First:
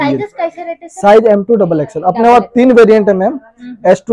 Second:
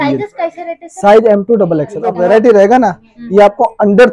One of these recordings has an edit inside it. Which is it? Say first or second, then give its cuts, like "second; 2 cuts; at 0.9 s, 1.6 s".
second; 1 cut; at 2.1 s